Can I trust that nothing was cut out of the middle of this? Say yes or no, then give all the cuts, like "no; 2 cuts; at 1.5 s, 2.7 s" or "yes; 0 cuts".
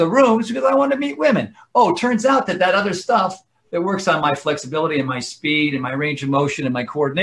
yes; 0 cuts